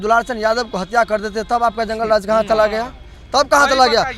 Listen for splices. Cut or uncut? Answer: uncut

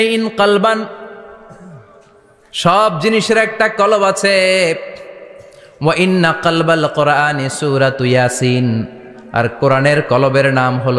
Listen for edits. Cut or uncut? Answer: uncut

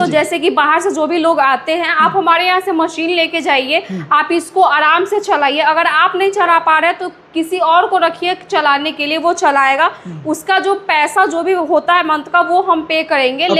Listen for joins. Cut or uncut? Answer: uncut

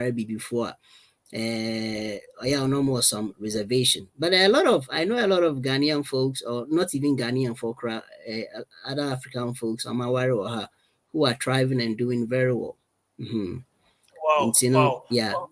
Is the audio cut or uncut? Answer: uncut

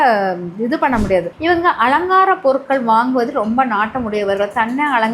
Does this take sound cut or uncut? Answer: cut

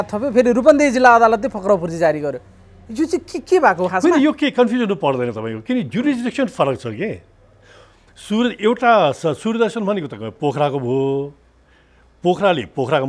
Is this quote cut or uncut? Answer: uncut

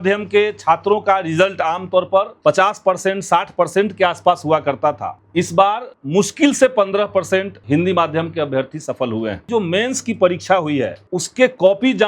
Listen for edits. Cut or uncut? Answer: cut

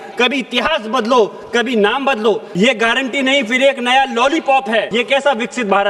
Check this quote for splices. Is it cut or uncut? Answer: cut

